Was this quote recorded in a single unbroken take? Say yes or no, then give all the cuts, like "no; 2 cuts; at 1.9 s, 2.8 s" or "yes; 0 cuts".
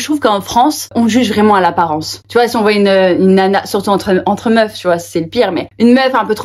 no; 1 cut; at 0.9 s